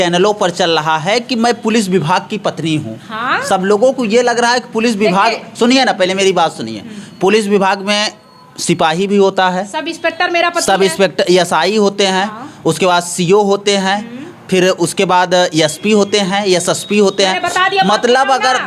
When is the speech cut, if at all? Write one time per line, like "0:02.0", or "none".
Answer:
none